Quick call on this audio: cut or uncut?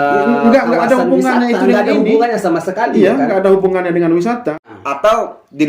cut